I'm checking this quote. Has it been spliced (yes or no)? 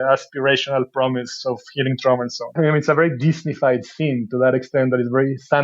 yes